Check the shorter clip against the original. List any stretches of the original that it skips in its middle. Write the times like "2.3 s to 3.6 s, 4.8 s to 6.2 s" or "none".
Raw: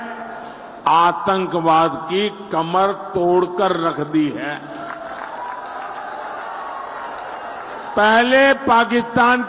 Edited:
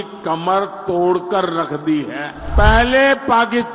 4.6 s to 7.8 s